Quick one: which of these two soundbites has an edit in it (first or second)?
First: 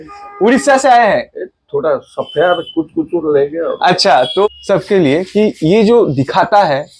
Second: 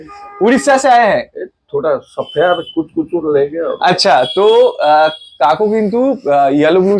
first